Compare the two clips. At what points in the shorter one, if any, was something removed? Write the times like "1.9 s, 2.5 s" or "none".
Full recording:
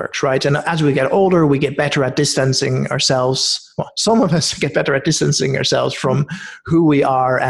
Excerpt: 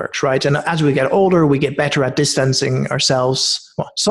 none